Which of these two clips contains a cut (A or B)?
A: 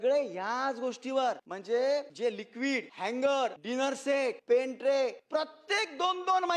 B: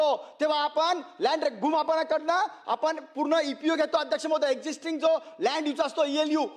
A